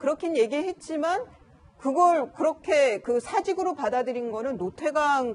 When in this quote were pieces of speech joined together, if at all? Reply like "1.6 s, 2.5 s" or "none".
none